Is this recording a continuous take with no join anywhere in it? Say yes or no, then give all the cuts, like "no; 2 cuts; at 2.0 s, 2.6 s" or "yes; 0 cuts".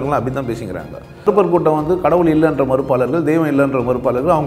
no; 1 cut; at 1.3 s